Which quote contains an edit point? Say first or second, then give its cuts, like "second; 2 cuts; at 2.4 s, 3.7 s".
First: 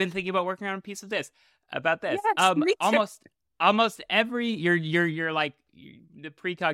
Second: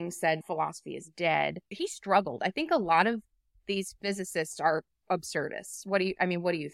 second; 1 cut; at 1.7 s